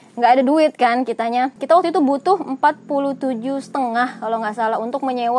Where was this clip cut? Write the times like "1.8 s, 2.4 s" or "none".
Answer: 1.6 s